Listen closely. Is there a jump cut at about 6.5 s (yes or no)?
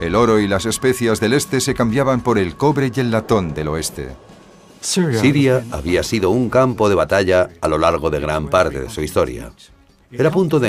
yes